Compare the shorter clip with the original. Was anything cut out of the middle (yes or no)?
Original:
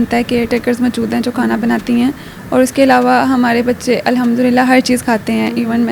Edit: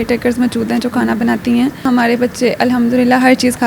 yes